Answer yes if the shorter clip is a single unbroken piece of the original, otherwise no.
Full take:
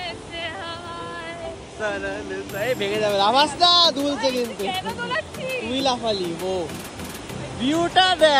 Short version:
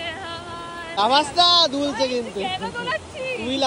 no